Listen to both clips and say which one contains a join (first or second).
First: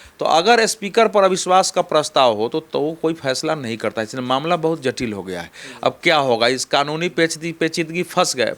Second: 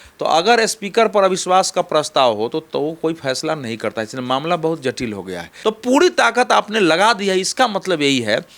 second